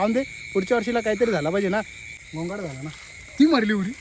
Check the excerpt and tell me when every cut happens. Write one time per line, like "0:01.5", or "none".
0:02.0